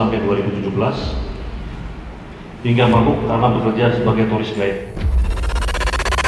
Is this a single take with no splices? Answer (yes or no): yes